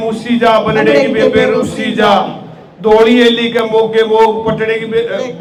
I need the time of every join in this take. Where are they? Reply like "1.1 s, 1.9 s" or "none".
none